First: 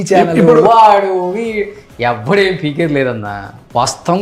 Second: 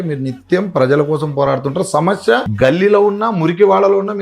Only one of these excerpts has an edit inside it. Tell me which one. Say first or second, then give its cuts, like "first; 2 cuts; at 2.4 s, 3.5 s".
second; 1 cut; at 2.5 s